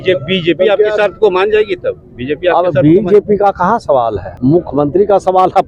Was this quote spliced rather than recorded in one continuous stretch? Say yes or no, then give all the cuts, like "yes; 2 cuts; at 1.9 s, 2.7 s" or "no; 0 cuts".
yes; 1 cut; at 4.3 s